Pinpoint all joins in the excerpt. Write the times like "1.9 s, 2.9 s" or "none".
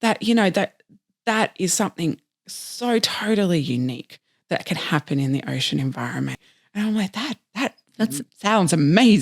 6.5 s